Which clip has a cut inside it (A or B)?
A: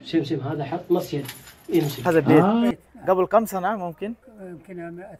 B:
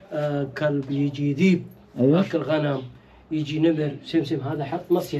A